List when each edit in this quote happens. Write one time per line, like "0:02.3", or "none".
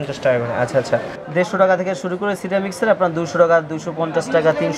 0:01.2